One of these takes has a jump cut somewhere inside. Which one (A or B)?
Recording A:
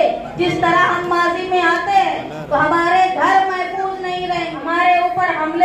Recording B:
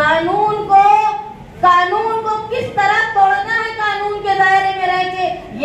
A